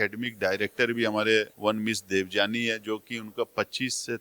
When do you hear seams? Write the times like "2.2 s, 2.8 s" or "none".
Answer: 1.5 s

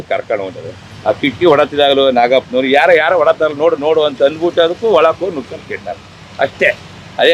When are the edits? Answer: none

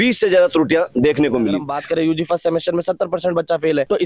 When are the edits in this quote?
1.7 s

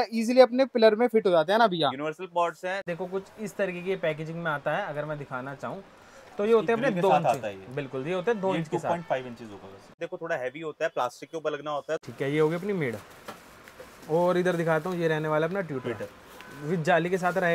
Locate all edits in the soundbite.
2.8 s, 10.0 s, 12.0 s

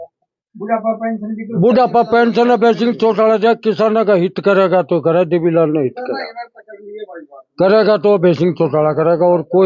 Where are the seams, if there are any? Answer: none

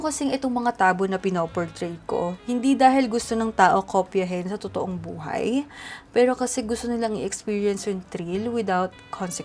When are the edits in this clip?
none

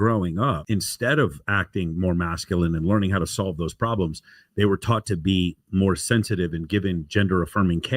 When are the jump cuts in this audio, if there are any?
none

